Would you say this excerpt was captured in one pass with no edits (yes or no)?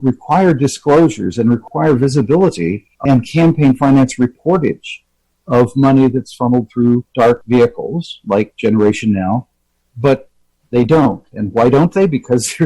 no